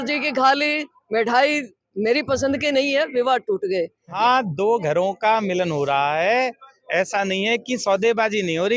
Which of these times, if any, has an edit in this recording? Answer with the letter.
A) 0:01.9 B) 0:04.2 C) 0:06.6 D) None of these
B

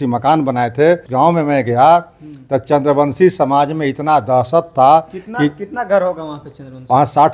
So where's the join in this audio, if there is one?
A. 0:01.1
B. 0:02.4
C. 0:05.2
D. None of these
A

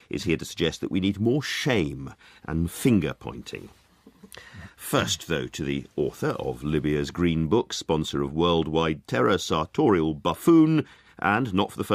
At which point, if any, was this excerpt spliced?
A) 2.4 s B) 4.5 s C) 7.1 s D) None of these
D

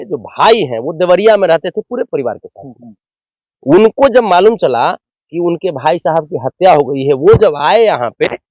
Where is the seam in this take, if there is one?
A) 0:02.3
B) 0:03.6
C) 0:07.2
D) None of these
D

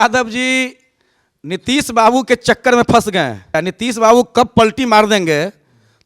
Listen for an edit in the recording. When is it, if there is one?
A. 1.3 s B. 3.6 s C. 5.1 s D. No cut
B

